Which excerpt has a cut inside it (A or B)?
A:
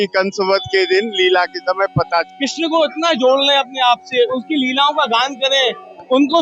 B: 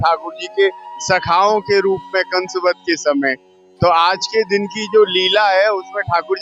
A